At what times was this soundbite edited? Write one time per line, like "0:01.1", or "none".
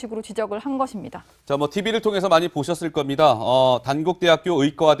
0:03.1